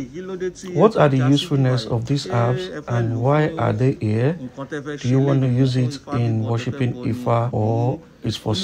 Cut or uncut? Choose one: uncut